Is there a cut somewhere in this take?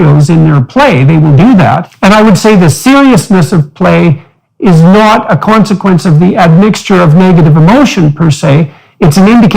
yes; 1 cut; at 1.9 s

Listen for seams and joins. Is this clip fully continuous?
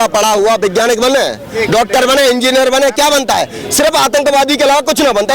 yes; 0 cuts

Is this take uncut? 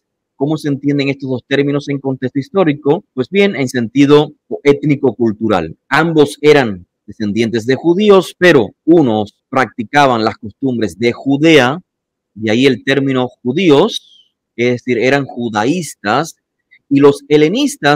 yes; 0 cuts

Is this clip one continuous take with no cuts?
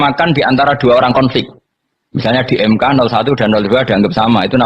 yes; 0 cuts

